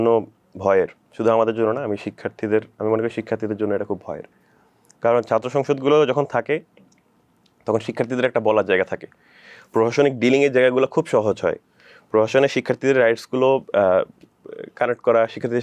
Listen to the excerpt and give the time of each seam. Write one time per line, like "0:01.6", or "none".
none

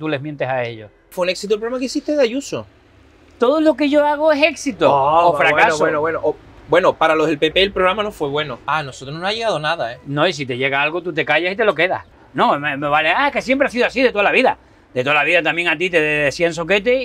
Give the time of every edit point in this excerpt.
0:01.1
0:08.6
0:12.2

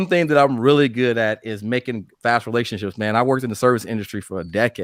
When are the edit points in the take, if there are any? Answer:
none

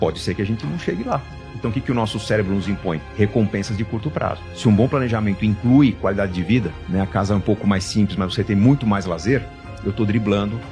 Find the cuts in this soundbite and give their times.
none

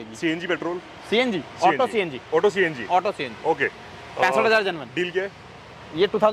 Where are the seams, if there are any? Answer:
none

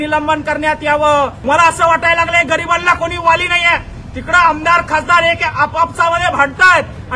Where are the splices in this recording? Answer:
0:01.4

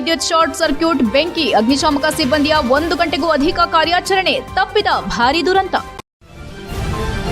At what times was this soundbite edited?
0:06.0

